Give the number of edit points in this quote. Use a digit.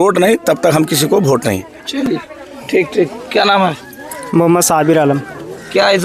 0